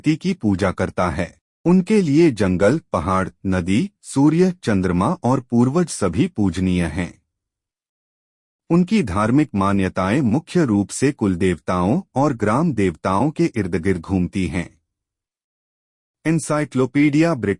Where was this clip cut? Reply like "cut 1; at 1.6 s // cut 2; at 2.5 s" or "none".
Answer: cut 1; at 1.4 s